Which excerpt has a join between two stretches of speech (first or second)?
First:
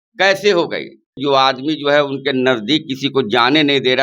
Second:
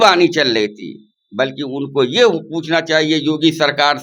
first